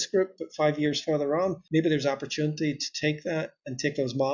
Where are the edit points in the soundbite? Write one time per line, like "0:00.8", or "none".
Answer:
0:01.6